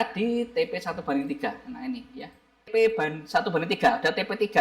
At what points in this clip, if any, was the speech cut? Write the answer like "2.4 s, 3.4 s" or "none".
2.7 s